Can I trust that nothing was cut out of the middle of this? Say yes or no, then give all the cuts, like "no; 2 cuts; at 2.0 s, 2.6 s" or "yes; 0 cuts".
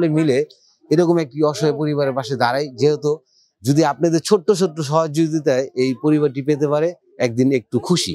yes; 0 cuts